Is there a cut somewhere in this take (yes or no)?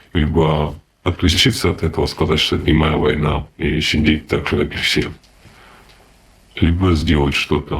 no